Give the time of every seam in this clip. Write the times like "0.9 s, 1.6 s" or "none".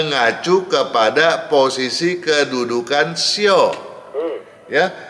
none